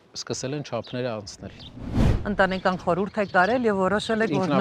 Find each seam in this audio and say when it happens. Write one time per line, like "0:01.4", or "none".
0:02.0